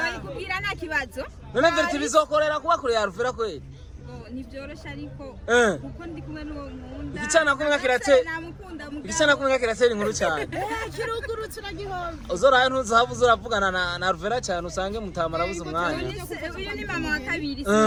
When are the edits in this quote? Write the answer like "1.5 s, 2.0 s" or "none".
none